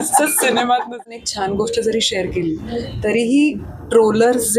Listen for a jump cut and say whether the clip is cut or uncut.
cut